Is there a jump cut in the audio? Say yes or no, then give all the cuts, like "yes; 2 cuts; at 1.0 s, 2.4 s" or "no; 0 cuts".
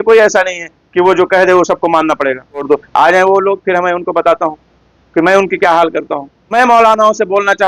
yes; 2 cuts; at 2.6 s, 6.3 s